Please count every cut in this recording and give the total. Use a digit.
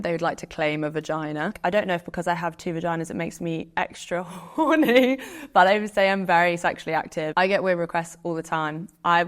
2